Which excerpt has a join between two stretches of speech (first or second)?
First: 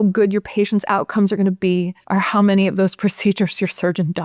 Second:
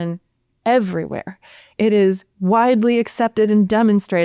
first